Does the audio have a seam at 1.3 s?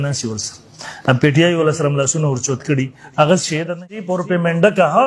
no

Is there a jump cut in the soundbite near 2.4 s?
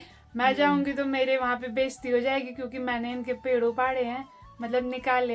no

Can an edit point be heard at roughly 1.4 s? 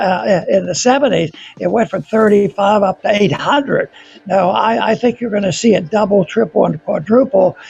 no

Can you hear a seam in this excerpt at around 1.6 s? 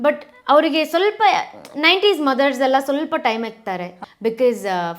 no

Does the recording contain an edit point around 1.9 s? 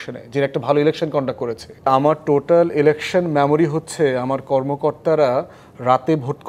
yes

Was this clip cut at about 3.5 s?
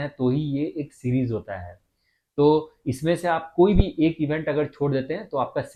no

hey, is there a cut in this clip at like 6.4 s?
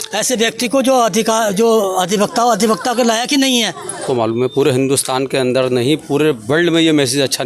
no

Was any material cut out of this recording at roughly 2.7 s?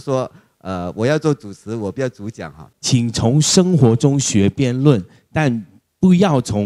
yes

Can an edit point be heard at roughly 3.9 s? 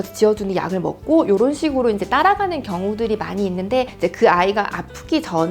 yes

